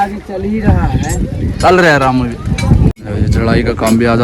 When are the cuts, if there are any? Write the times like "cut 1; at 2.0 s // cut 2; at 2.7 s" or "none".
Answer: cut 1; at 3.0 s